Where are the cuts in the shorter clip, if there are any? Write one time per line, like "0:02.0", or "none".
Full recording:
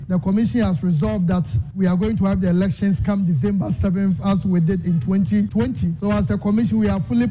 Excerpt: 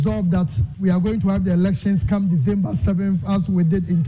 none